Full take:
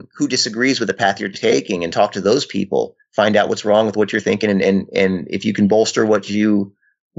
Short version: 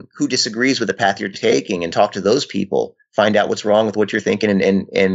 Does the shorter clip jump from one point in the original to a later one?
no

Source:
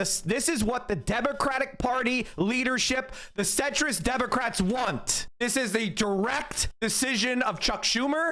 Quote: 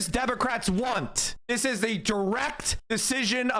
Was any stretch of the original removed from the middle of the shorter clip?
no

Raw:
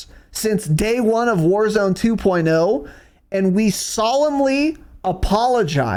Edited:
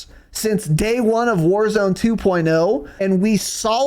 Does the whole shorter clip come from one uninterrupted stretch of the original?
no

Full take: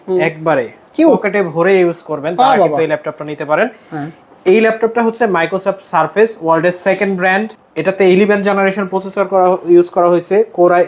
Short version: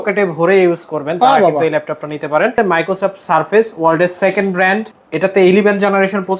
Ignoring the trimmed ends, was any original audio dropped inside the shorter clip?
yes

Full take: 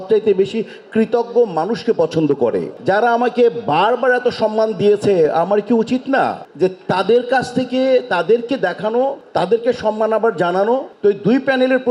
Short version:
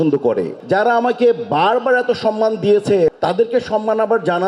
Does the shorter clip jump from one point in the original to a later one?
yes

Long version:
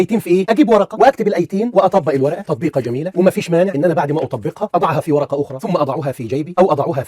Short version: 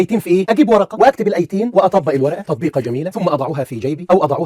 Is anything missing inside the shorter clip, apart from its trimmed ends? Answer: yes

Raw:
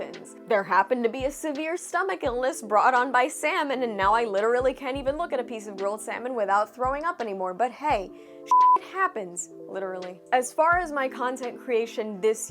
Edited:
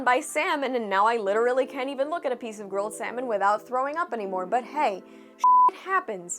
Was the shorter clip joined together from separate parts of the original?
no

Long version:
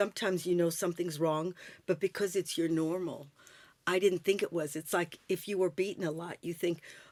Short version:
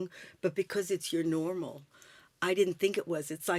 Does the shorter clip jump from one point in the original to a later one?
no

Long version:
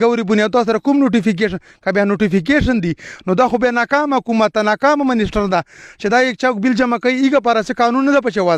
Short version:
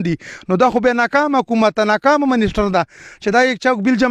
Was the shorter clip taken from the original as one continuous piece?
yes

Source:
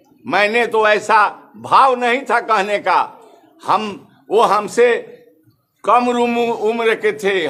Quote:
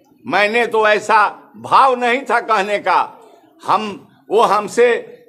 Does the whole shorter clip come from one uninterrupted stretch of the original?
yes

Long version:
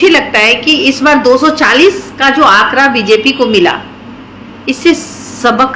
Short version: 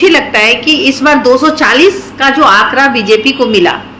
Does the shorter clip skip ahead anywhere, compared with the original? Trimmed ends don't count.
no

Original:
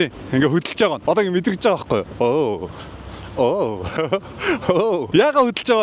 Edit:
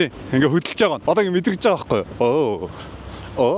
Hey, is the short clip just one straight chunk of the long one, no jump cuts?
yes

